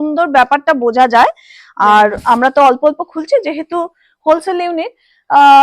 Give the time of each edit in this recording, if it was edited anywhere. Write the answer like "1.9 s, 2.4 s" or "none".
none